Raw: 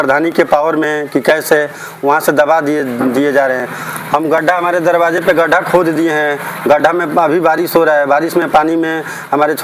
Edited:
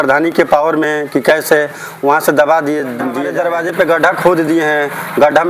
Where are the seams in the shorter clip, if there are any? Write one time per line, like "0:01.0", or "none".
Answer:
0:03.2